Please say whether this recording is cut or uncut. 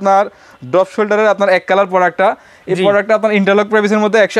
uncut